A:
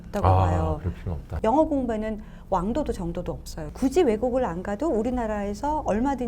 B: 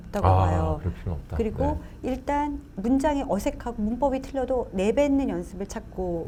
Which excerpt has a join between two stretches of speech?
A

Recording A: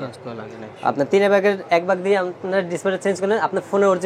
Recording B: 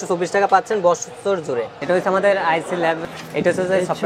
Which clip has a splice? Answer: B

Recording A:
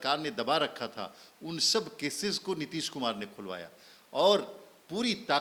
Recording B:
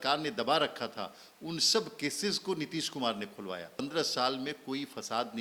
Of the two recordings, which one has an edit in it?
B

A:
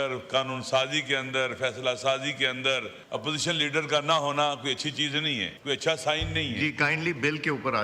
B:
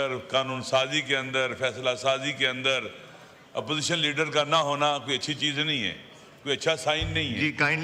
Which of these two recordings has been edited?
A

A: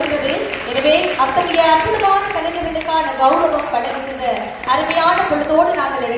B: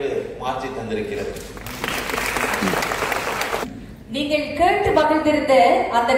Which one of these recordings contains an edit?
B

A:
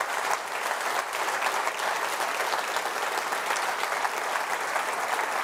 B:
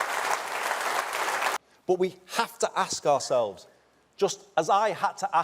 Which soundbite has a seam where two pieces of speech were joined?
B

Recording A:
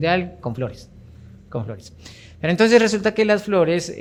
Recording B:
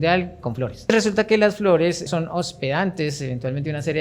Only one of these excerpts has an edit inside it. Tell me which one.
B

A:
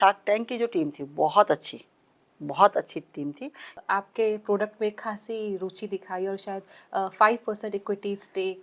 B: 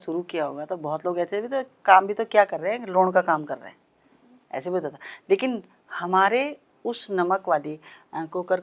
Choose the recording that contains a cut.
A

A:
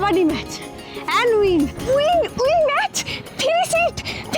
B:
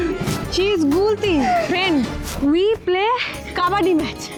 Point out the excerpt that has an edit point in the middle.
A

